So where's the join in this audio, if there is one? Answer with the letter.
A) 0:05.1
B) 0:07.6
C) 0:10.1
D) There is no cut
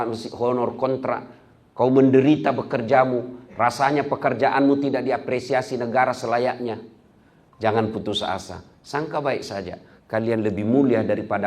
D